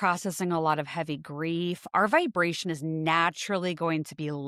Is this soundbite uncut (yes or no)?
yes